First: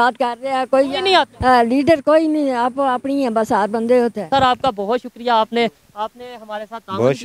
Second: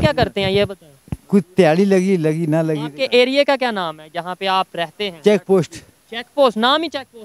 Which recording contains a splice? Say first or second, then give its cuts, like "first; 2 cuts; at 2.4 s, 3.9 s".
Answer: first; 1 cut; at 4.3 s